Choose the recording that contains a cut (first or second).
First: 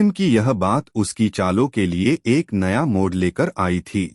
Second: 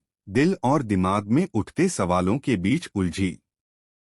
second